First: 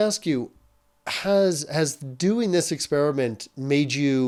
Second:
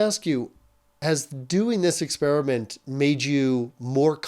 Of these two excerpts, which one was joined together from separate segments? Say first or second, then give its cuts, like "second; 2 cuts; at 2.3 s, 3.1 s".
second; 1 cut; at 0.9 s